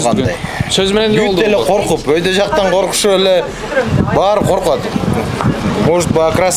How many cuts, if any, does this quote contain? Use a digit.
0